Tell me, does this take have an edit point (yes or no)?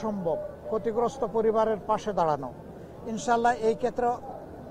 no